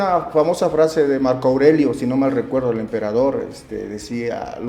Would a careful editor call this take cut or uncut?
uncut